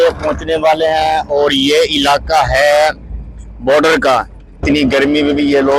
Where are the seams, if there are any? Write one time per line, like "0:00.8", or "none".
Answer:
0:04.6